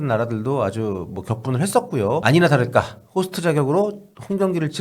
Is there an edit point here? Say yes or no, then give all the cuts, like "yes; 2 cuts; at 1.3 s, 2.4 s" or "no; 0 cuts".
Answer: yes; 1 cut; at 2.2 s